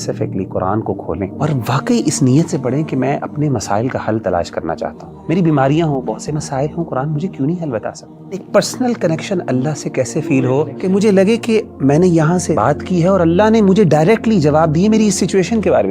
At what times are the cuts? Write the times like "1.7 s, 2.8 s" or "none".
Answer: 1.3 s, 5.1 s, 8.4 s, 10.7 s, 12.6 s